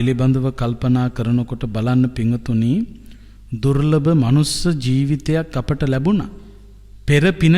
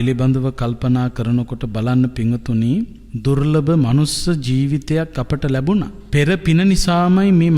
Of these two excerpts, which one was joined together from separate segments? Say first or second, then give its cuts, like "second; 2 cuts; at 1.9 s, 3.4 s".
second; 2 cuts; at 3.0 s, 6.0 s